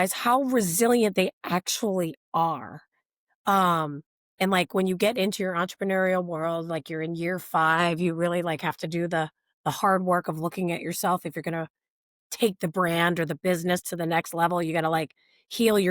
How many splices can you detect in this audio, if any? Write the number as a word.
zero